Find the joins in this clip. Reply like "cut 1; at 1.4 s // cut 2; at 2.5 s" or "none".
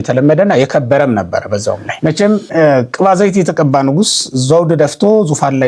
cut 1; at 1.9 s